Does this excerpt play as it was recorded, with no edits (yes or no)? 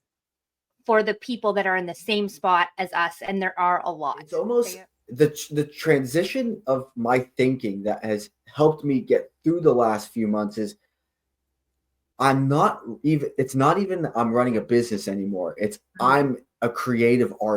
no